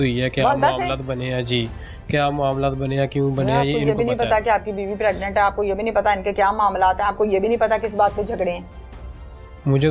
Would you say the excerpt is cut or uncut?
uncut